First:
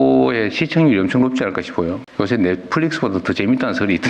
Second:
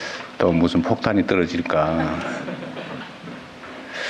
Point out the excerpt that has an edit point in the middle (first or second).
first